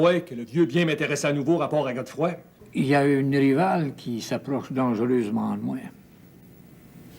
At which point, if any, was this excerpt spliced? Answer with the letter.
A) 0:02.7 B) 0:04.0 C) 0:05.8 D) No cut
A